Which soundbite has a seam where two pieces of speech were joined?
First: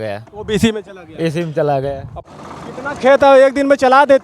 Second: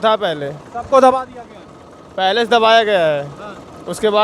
first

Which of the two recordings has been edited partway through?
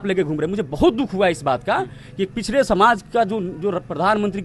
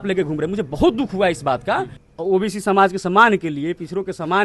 second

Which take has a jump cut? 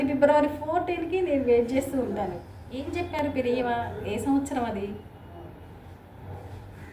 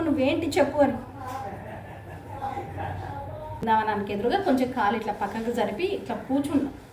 second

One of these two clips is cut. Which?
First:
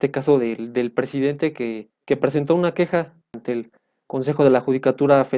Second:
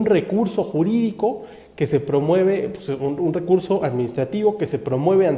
first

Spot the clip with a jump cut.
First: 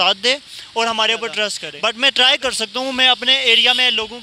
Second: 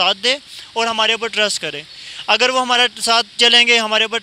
first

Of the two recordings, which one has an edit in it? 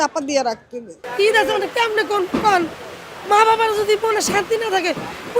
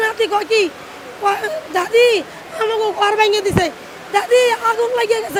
first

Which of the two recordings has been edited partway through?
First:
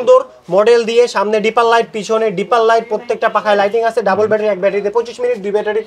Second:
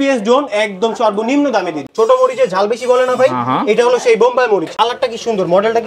second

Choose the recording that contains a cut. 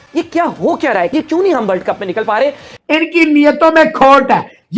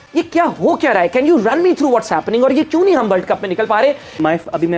first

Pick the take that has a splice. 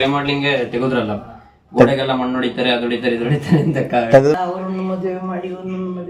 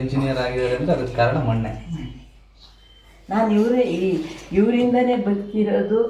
first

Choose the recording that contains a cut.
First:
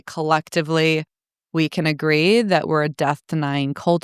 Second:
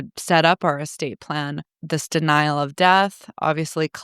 second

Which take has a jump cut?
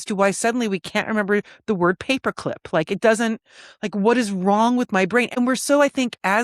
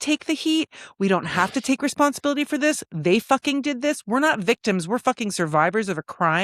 first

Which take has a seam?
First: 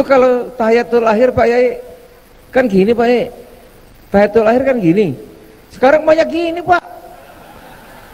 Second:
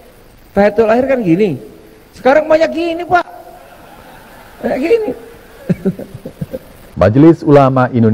second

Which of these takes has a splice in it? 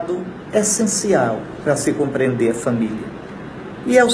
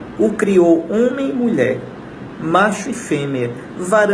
first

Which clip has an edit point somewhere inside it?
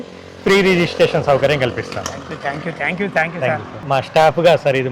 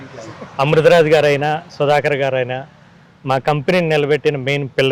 first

